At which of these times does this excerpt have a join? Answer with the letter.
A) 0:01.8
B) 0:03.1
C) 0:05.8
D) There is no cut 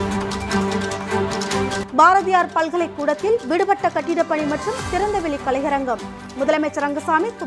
A